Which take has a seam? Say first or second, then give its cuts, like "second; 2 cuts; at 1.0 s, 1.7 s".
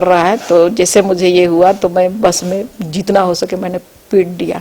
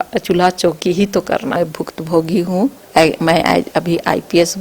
second; 1 cut; at 1.5 s